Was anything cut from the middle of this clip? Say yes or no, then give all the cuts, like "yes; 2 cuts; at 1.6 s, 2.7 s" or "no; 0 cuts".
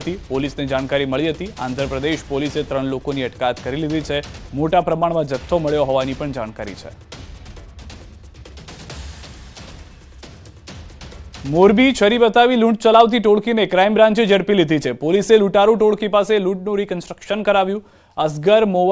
yes; 1 cut; at 16.4 s